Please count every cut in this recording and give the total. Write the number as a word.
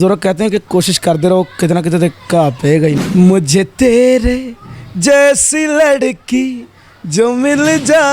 one